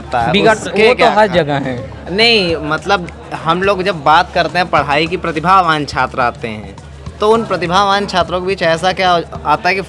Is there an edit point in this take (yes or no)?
no